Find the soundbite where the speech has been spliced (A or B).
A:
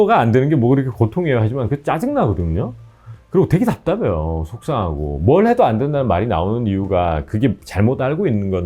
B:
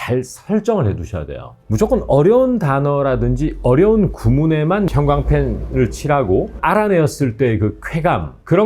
B